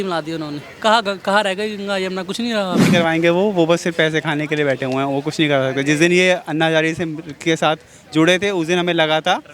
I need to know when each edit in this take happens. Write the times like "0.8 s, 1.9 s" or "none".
2.8 s